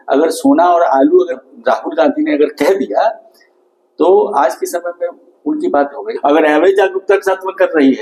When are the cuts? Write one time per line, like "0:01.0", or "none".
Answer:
0:01.4
0:06.0